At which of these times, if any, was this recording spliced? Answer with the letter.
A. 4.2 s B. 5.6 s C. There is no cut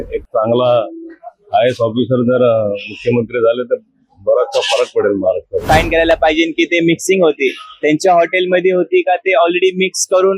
B